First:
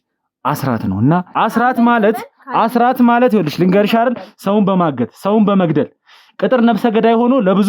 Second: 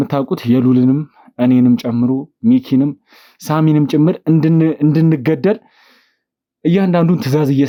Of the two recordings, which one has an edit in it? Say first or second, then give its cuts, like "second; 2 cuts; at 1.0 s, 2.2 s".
first; 1 cut; at 1.3 s